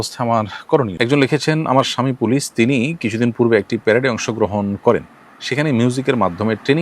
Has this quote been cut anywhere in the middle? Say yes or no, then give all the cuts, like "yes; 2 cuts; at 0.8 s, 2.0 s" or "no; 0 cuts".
yes; 1 cut; at 0.9 s